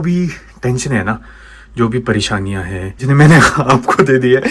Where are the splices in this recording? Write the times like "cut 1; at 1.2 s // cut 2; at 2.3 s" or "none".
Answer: cut 1; at 3.0 s